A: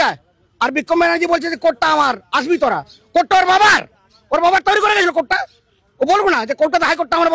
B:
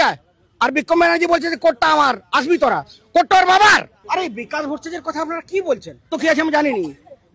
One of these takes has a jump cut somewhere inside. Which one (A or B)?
B